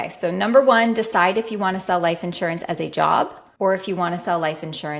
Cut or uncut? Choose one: cut